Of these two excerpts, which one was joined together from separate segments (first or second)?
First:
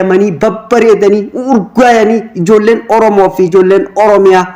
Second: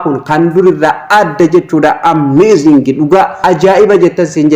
second